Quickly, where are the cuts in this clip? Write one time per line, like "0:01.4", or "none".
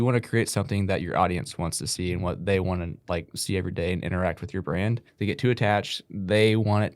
0:05.1